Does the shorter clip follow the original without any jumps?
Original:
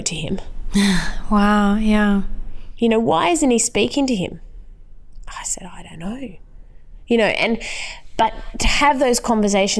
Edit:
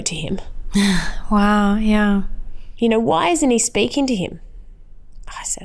yes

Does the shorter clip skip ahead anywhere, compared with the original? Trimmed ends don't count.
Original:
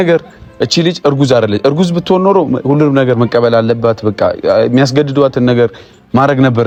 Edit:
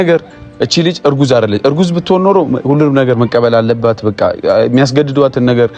no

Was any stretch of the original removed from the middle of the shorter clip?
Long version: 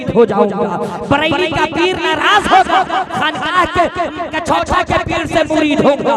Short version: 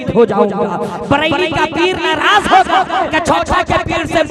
yes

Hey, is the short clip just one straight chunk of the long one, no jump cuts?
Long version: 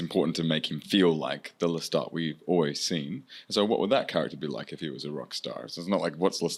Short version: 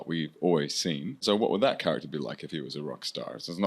no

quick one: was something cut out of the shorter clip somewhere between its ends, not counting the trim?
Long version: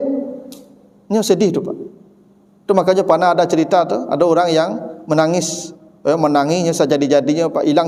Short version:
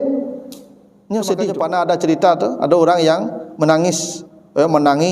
yes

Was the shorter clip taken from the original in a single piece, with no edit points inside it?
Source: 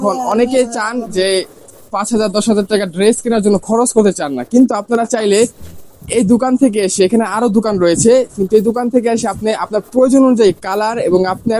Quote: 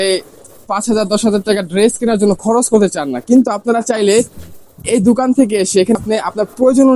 no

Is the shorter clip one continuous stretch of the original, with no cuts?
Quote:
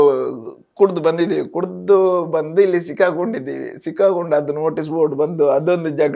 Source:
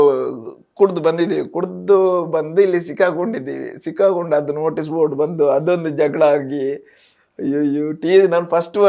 yes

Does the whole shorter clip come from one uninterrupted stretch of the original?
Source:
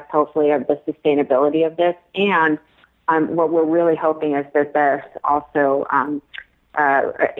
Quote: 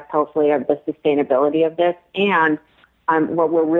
yes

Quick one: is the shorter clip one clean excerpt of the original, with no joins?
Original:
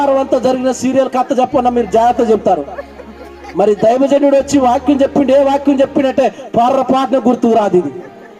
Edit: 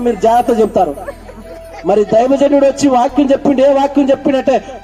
yes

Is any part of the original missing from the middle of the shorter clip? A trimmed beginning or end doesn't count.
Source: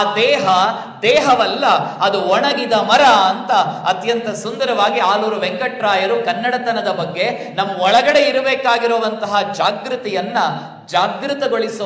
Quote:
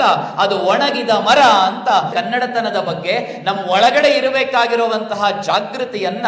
yes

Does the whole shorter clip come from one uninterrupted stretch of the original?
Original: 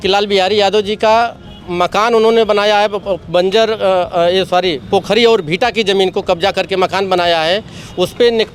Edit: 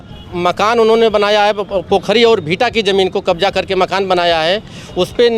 no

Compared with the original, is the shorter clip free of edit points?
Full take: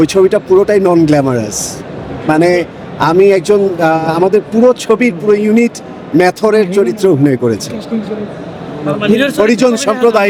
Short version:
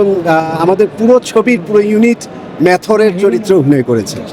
yes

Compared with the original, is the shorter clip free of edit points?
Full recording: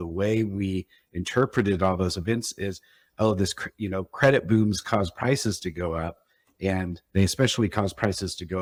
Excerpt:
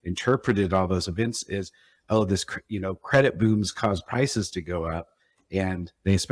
yes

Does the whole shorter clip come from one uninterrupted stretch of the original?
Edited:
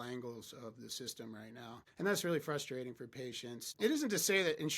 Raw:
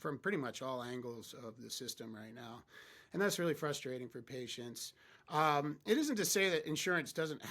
no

